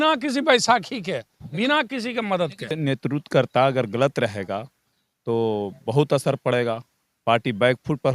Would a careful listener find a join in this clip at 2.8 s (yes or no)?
yes